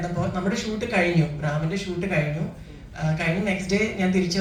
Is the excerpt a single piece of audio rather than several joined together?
yes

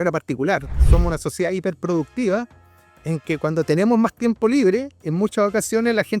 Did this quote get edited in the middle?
yes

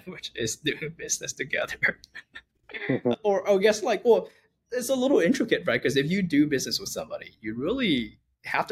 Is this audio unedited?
yes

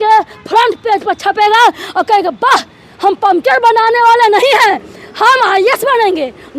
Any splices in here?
no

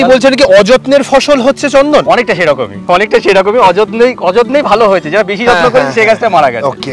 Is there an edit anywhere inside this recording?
no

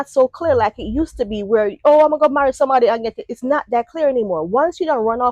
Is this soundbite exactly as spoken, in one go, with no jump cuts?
yes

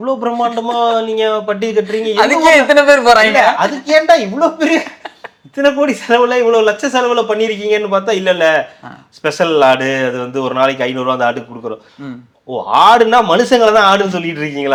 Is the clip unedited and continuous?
yes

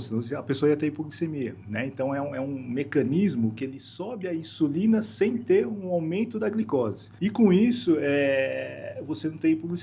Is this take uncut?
no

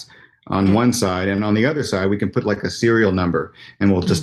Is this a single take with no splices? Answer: yes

